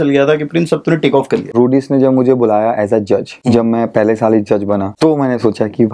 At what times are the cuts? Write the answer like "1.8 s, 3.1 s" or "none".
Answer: 1.5 s, 3.3 s, 4.9 s

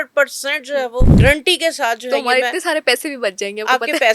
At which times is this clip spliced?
1.1 s

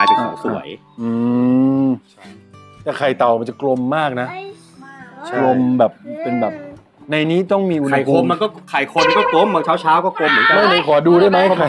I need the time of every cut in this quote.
none

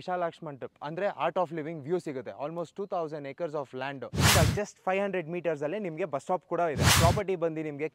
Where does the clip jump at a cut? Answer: 4.3 s, 6.9 s

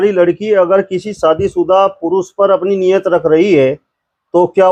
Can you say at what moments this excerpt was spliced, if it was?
none

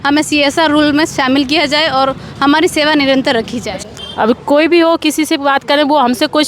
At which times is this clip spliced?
3.6 s

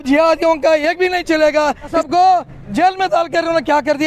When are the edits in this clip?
1.9 s

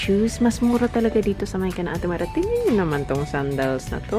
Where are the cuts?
none

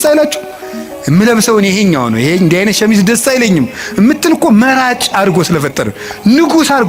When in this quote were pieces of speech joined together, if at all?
none

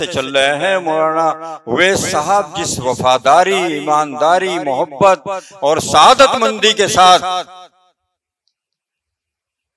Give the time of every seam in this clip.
none

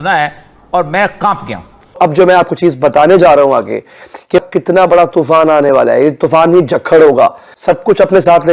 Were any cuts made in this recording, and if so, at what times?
2.0 s, 4.4 s

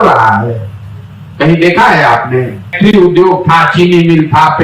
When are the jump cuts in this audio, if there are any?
2.7 s

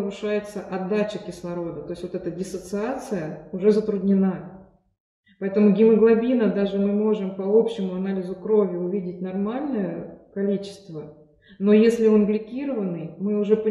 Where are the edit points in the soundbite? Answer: none

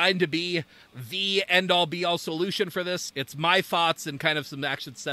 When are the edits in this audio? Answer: none

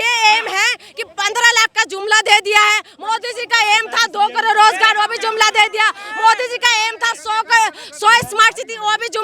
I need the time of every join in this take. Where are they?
none

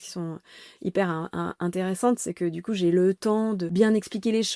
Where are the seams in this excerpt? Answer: 3.7 s

